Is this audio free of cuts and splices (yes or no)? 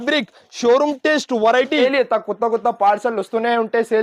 no